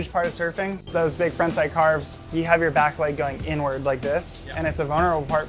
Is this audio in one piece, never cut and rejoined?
no; 1 cut; at 1.0 s

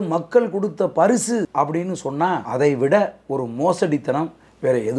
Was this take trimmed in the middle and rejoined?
yes; 2 cuts; at 1.5 s, 2.5 s

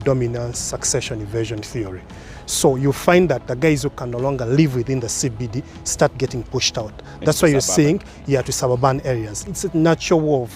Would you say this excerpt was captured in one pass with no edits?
yes; 0 cuts

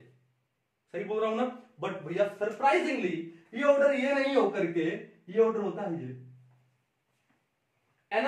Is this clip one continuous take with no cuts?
yes; 0 cuts

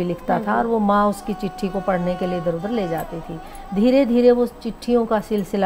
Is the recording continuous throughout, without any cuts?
yes; 0 cuts

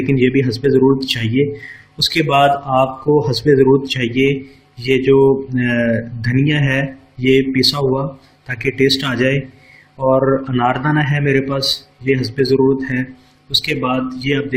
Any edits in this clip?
yes; 1 cut; at 11.6 s

